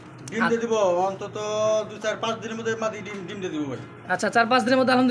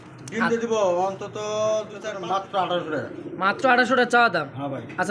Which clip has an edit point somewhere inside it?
second; 1 cut; at 2.0 s

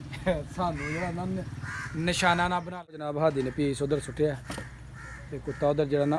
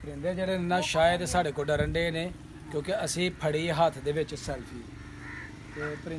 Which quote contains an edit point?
first; 1 cut; at 2.7 s

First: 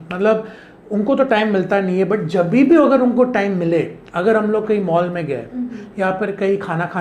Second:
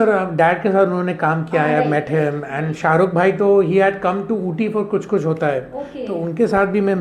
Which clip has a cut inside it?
second; 2 cuts; at 1.8 s, 5.4 s

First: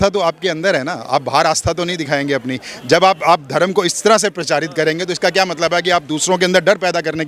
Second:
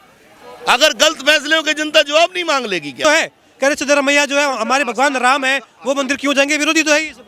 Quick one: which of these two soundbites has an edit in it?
second; 1 cut; at 3.0 s

